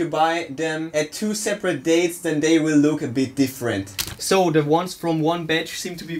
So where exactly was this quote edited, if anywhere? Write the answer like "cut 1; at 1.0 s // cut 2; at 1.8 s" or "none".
cut 1; at 0.9 s // cut 2; at 3.8 s